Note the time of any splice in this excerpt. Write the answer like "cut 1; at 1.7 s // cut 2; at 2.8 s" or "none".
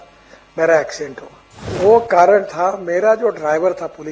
cut 1; at 1.7 s